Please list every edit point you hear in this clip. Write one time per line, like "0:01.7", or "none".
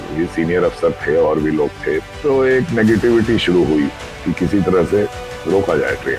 0:02.1
0:05.3